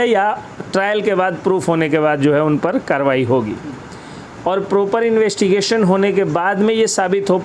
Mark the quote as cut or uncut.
uncut